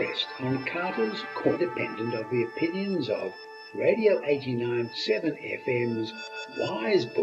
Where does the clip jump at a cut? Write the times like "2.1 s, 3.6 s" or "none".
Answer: 1.6 s